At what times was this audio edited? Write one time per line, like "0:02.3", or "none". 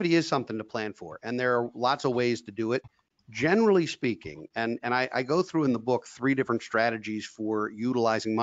none